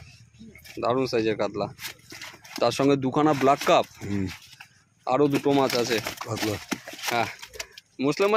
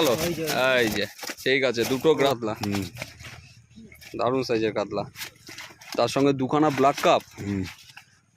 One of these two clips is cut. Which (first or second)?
second